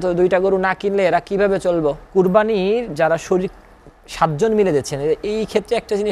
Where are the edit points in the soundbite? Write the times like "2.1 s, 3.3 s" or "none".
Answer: 2.0 s